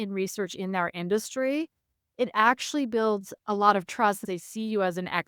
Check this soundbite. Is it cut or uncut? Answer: cut